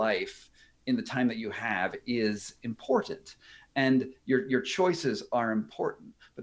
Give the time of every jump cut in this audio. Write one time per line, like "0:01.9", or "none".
none